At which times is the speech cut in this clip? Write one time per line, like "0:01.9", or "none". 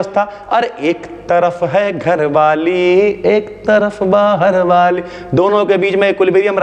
none